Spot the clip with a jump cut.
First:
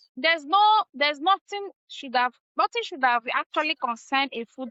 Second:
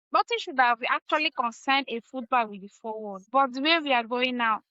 second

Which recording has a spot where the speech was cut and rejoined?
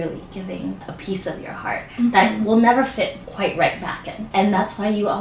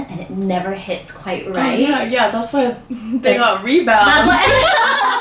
first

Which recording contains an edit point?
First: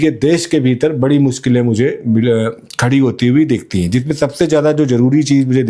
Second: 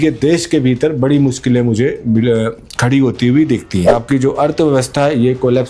second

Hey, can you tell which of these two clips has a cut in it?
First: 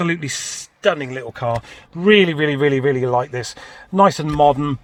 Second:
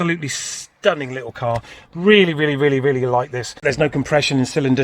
second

